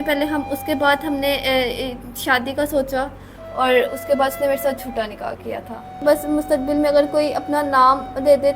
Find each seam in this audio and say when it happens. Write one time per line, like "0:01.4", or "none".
0:06.0